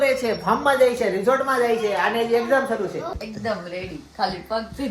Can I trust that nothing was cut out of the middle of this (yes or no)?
no